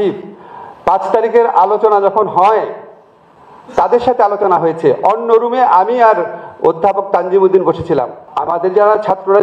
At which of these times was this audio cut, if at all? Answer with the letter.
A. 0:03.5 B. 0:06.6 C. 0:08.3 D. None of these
C